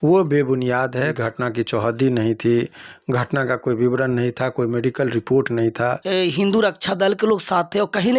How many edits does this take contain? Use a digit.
2